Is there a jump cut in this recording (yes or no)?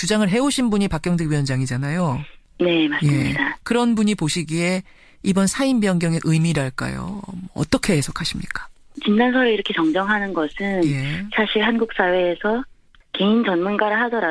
no